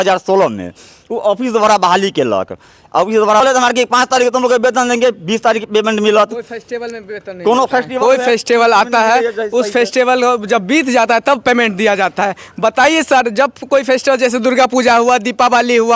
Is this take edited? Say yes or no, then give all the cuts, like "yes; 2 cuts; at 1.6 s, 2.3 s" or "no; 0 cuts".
yes; 1 cut; at 3.4 s